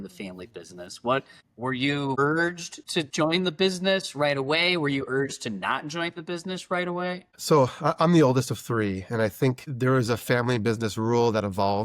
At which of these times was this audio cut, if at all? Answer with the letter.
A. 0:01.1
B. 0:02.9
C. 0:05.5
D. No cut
B